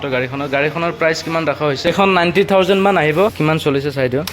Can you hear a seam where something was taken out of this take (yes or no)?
yes